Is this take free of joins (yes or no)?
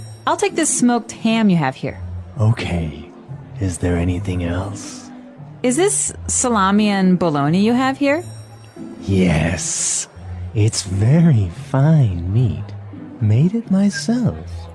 yes